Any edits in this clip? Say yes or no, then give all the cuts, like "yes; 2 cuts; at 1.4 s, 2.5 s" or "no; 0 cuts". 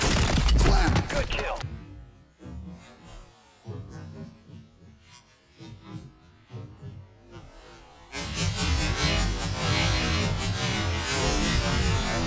no; 0 cuts